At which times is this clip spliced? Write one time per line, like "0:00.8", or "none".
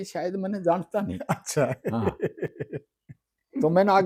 none